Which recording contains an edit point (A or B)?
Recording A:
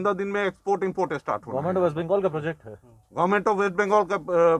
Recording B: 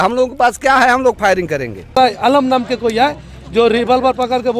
B